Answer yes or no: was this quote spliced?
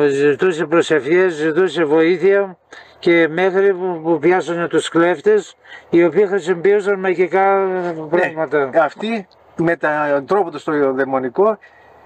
yes